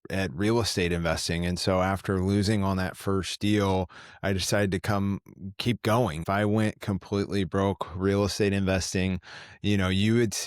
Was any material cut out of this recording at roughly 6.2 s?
yes; 1 cut; at 6.2 s

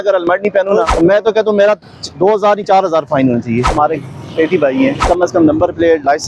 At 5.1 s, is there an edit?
yes; 3 cuts; at 0.9 s, 3.7 s, 5.1 s

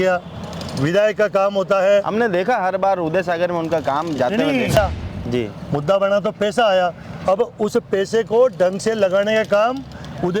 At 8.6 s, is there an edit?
no; 1 cut; at 4.8 s

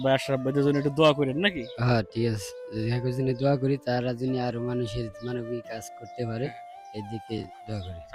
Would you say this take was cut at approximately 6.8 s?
no; 0 cuts

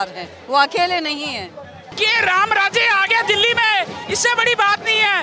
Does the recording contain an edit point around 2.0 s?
yes; 1 cut; at 2.0 s

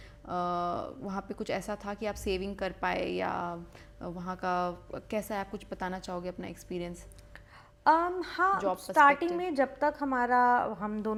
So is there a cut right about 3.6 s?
no; 0 cuts

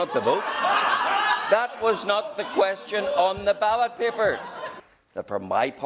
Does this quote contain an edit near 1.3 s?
no; 1 cut; at 4.7 s

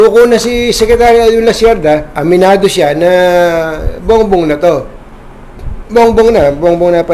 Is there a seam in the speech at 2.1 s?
yes; 1 cut; at 2.1 s

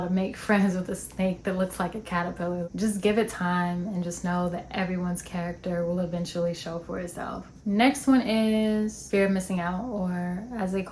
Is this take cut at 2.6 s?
no; 0 cuts

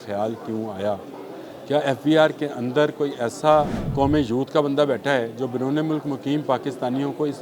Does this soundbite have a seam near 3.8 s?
yes; 1 cut; at 3.8 s

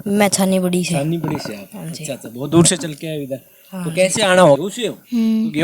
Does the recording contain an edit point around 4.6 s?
yes; 1 cut; at 4.6 s

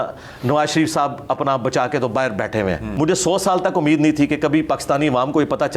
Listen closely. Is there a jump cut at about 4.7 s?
no; 1 cut; at 2.9 s

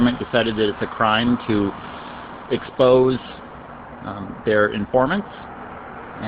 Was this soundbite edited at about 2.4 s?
no; 0 cuts

